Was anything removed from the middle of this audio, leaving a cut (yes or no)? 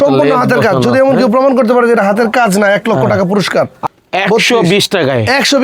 yes